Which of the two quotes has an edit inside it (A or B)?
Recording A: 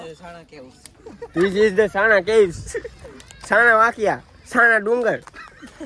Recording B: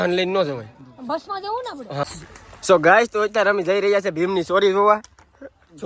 B